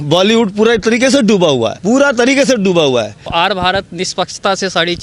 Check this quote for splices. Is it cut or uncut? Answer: cut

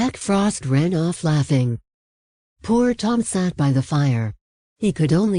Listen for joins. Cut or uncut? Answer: uncut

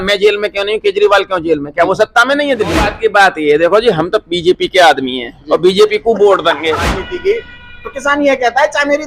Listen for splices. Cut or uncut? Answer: cut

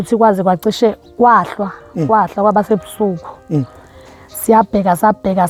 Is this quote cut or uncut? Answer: uncut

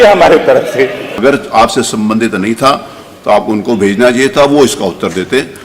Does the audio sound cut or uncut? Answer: cut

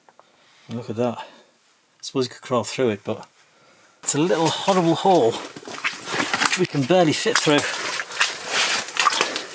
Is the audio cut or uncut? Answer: cut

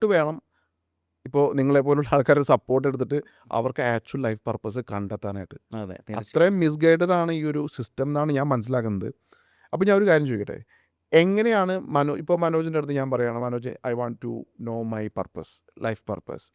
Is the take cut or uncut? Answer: uncut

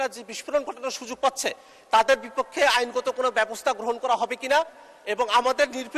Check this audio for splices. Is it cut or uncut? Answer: uncut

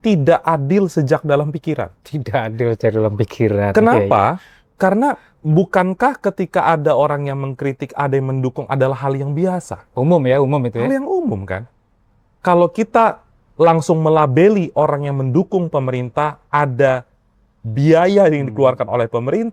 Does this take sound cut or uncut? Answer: uncut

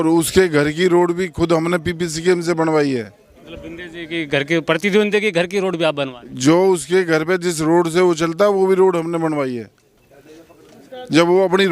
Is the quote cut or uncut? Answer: uncut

